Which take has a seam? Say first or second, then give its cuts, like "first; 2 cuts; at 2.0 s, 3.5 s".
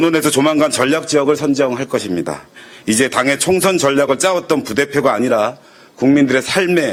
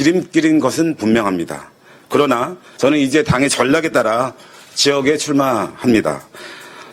second; 1 cut; at 2.6 s